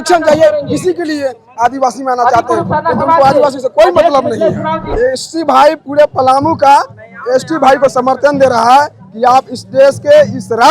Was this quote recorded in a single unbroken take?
no; 1 cut; at 4.8 s

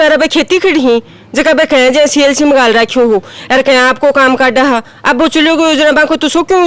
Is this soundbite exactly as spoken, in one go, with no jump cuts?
yes; 0 cuts

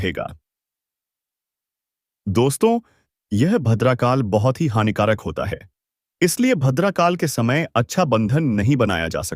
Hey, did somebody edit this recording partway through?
no; 0 cuts

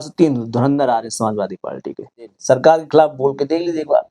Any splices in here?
yes; 1 cut; at 2.4 s

